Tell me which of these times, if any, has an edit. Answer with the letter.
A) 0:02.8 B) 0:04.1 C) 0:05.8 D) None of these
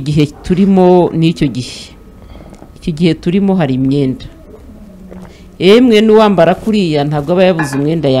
D